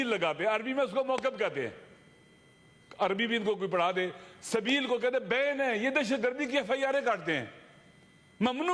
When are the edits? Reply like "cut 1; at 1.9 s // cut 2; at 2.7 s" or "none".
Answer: none